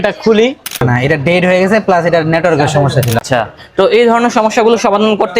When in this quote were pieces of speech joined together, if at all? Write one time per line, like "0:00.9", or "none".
0:00.8
0:03.2